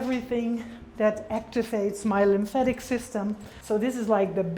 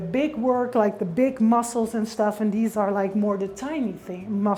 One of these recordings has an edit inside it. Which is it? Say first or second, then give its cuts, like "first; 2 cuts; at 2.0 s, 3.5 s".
first; 1 cut; at 3.5 s